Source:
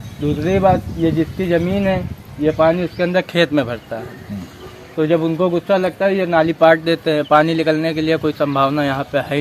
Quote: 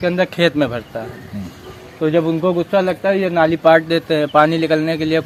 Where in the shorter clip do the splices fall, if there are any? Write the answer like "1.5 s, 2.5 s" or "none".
none